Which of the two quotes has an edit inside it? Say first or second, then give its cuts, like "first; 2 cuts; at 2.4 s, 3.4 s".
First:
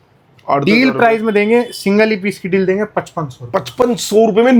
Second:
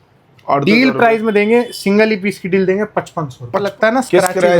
second; 1 cut; at 3.7 s